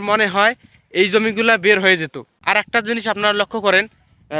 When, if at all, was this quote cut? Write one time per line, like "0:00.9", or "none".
0:02.4